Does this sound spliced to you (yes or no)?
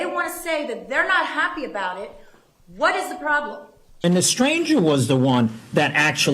yes